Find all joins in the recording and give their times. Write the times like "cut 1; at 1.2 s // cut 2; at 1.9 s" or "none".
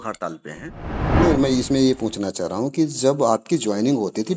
cut 1; at 1.2 s